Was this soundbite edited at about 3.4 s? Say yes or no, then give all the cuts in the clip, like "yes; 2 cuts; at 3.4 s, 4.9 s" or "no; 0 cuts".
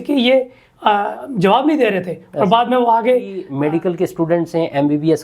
yes; 1 cut; at 3.4 s